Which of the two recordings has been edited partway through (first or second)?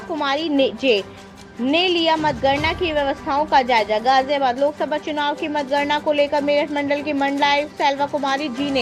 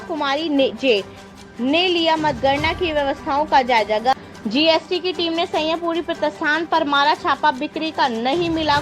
second